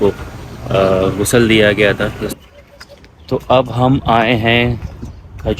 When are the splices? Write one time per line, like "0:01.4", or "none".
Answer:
0:02.3